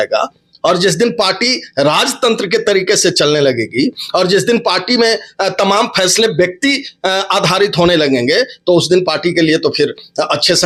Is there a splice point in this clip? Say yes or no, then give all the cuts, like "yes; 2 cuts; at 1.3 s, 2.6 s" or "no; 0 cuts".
no; 0 cuts